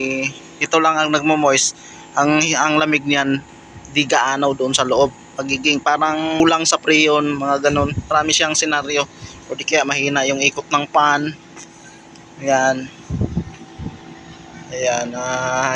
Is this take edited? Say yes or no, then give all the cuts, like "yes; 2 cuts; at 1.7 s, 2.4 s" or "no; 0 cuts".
yes; 1 cut; at 6.4 s